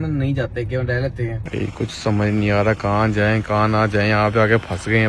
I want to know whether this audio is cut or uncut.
cut